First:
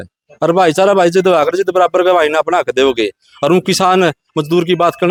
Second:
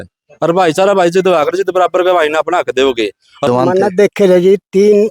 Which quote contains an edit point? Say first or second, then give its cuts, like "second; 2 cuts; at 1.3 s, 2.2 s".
second; 1 cut; at 3.5 s